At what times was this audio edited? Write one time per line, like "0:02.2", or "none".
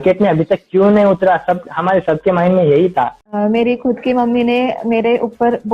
0:03.4